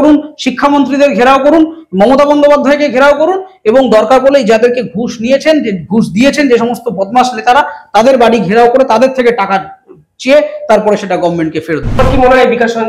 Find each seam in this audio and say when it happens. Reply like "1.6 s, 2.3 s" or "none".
12.0 s